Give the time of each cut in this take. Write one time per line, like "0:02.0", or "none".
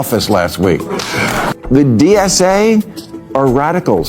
0:01.5